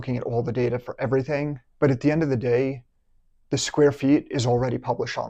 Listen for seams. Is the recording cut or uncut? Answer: uncut